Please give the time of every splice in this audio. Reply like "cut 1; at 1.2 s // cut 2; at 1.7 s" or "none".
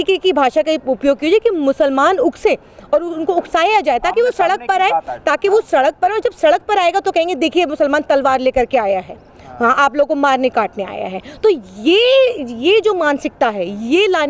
none